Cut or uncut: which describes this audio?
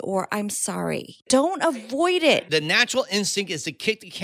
cut